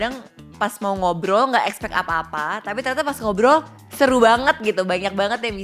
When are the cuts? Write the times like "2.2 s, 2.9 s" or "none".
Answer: 3.8 s